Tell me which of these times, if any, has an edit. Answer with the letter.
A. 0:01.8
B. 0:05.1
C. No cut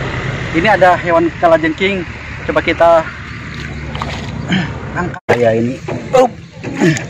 B